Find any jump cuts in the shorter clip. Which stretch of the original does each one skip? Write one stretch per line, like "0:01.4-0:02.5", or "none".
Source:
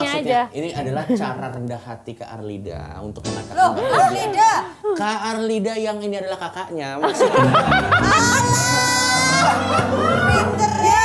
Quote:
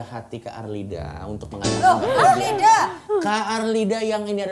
none